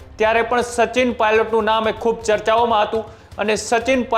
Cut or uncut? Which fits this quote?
uncut